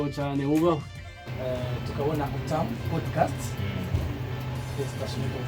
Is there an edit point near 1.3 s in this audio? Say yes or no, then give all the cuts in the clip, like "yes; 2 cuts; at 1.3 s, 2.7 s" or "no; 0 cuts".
yes; 1 cut; at 1.3 s